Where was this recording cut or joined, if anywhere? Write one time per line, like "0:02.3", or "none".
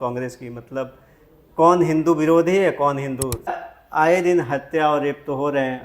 0:03.6

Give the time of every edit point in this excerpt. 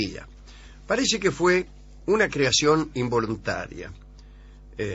0:03.9

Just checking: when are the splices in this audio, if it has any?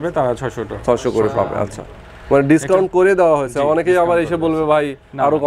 none

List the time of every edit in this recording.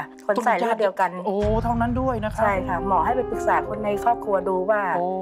none

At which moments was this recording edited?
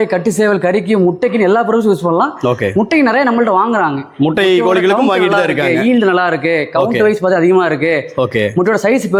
none

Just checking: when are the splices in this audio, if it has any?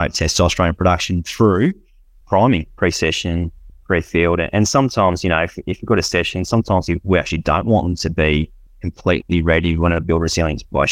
0:02.7

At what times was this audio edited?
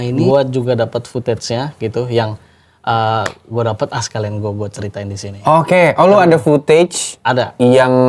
none

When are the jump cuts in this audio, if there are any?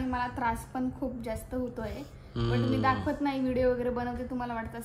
none

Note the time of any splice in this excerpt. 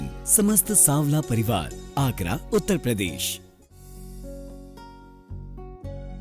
0:03.2

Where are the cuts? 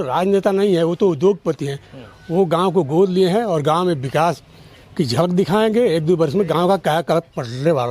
none

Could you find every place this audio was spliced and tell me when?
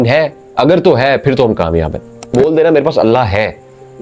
0:02.4

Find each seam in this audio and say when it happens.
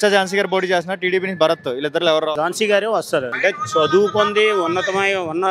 0:02.3
0:03.3

